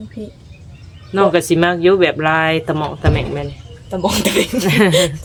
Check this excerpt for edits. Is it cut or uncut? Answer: uncut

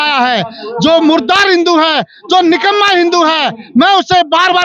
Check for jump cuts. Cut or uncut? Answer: uncut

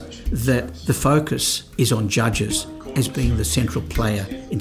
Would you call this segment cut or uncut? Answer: cut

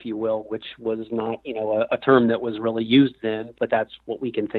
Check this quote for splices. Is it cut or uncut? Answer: cut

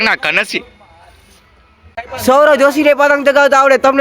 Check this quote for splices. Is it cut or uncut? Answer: cut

